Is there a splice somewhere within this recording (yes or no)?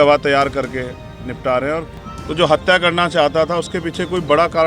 yes